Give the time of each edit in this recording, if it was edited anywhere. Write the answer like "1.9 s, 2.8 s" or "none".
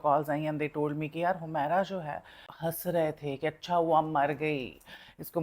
2.5 s